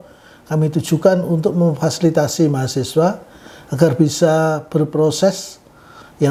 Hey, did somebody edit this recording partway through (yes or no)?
no